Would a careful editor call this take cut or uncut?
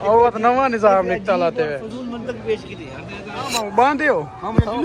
cut